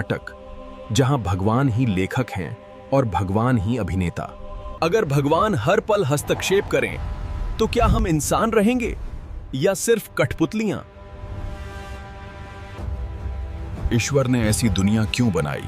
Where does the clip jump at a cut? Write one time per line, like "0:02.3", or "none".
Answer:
0:04.8
0:12.8